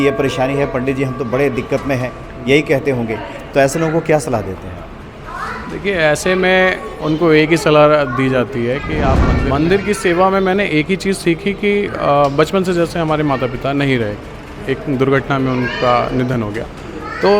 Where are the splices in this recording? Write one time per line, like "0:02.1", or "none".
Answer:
0:09.3